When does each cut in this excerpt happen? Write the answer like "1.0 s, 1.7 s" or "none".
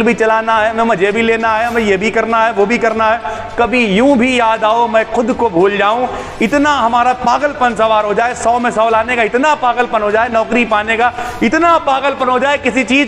none